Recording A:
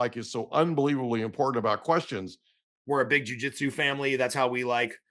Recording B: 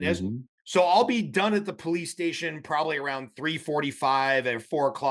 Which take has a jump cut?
A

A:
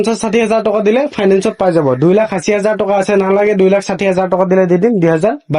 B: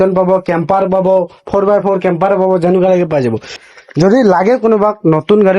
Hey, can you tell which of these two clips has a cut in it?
B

